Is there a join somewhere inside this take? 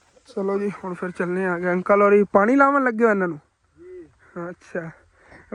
no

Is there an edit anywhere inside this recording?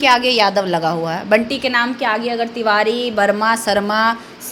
no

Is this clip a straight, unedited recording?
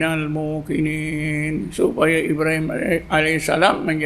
yes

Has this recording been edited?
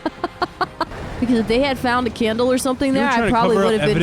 yes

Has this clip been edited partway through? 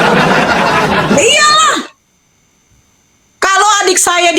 yes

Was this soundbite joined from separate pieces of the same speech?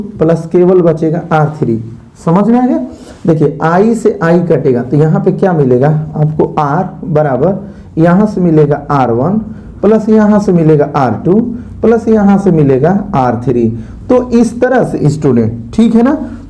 no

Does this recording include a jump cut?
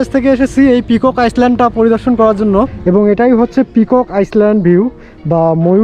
yes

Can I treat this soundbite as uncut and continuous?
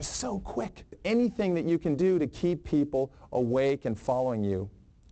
no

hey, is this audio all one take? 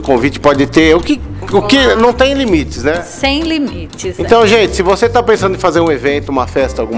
yes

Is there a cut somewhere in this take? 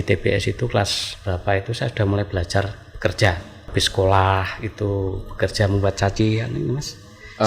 yes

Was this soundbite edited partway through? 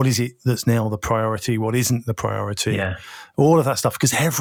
no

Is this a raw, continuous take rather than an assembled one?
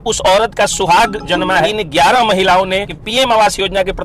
no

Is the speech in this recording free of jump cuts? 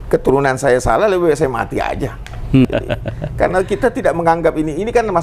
no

